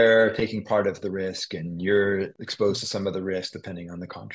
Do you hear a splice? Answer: yes; 1 cut; at 2.4 s

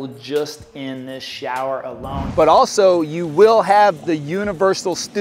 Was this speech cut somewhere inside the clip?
yes; 1 cut; at 2.2 s

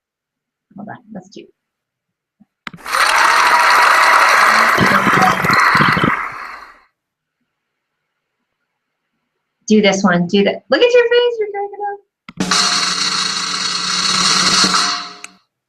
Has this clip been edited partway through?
no; 0 cuts

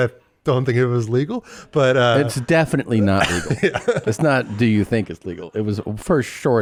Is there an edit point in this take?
no; 0 cuts

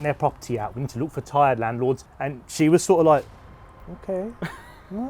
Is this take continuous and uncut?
no; 1 cut; at 2.2 s

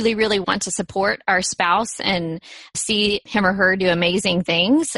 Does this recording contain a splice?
yes; 1 cut; at 2.8 s

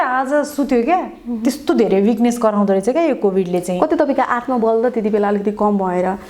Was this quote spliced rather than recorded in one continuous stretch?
no; 0 cuts

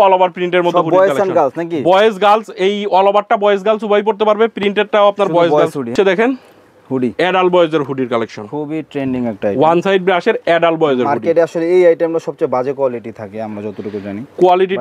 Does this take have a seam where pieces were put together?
yes; 1 cut; at 5.9 s

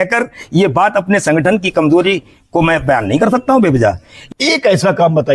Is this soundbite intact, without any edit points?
no; 1 cut; at 4.2 s

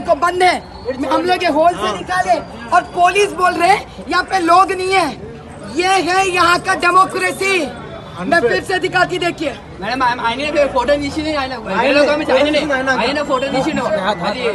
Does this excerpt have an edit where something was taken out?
no; 0 cuts

